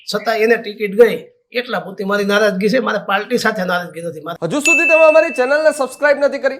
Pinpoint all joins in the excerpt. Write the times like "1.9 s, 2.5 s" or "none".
4.3 s